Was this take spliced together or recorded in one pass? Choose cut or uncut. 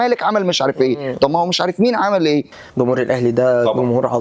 cut